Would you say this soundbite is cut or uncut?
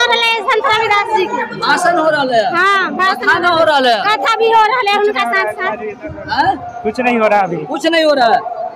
uncut